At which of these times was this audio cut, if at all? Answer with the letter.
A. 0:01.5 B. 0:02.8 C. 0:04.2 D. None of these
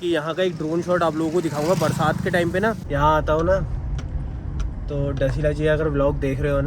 B